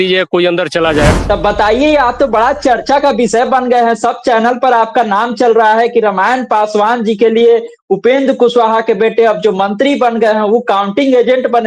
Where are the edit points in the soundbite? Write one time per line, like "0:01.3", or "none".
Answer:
0:01.2

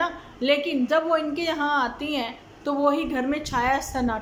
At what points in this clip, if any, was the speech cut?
none

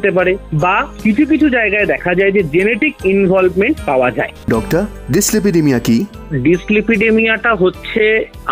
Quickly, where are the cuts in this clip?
0:04.4

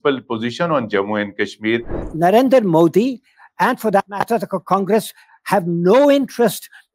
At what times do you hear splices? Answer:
0:02.0

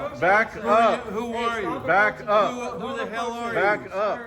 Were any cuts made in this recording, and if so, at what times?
none

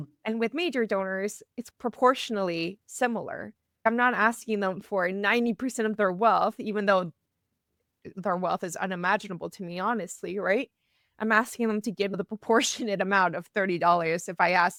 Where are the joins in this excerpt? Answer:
none

